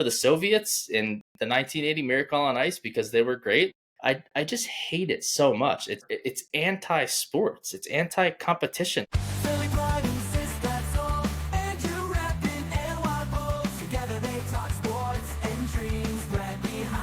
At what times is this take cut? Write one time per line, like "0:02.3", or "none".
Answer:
0:03.7
0:06.0
0:09.1